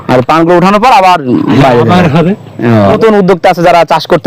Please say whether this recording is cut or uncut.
cut